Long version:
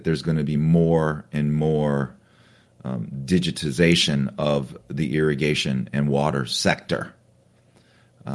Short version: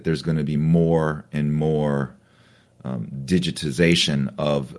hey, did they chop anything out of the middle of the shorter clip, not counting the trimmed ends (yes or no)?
no